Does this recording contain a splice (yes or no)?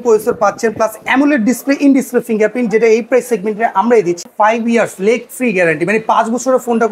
yes